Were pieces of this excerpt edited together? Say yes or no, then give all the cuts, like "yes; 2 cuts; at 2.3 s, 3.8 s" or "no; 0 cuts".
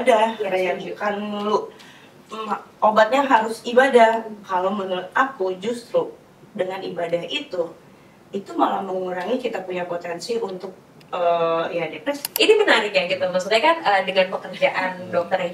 yes; 1 cut; at 12.3 s